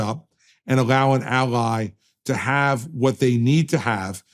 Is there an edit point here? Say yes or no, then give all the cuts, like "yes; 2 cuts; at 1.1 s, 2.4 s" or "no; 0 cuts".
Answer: no; 0 cuts